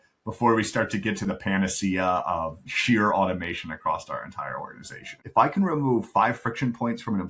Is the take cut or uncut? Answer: cut